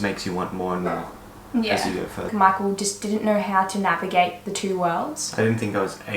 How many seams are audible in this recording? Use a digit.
1